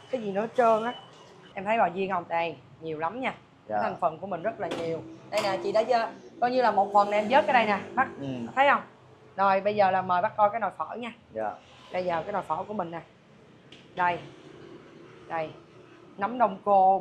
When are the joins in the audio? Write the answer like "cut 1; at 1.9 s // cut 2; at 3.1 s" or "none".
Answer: cut 1; at 1.4 s